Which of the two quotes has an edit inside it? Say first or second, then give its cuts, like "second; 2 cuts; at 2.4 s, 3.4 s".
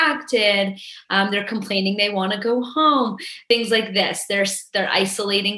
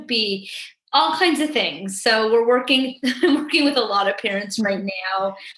first; 1 cut; at 3.3 s